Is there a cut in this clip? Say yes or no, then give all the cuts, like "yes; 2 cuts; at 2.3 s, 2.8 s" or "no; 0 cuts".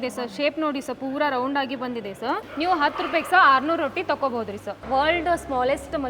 yes; 2 cuts; at 2.5 s, 4.7 s